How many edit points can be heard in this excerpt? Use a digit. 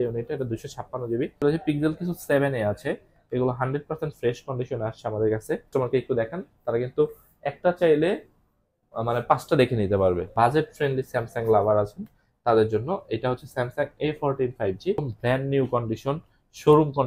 4